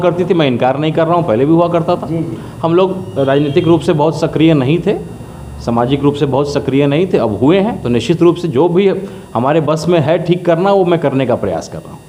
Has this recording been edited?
no; 0 cuts

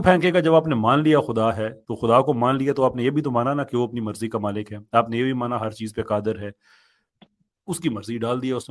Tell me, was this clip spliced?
no; 0 cuts

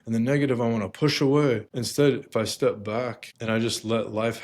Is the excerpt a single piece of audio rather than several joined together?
no; 2 cuts; at 1.8 s, 3.3 s

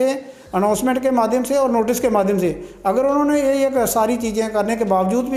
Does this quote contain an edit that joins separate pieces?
no; 0 cuts

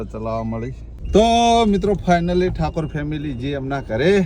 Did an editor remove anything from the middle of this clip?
yes; 1 cut; at 1.0 s

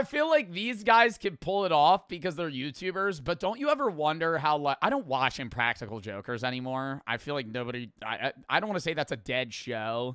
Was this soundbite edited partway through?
no; 0 cuts

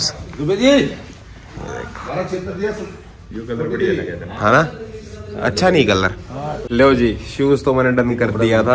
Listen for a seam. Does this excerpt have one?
yes; 1 cut; at 6.6 s

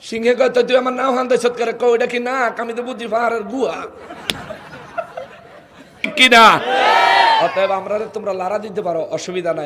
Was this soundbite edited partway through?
yes; 1 cut; at 6.1 s

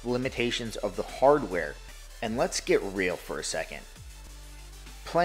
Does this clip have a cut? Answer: yes; 2 cuts; at 1.8 s, 4.2 s

